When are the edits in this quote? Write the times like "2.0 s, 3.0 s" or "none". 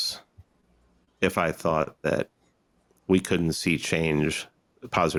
none